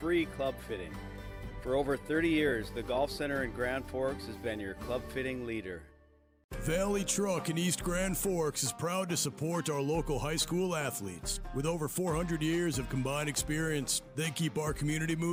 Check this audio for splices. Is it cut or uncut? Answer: uncut